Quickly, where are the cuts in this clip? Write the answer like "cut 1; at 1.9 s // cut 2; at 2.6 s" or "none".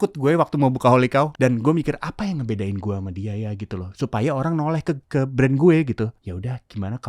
cut 1; at 1.3 s // cut 2; at 5.0 s // cut 3; at 6.2 s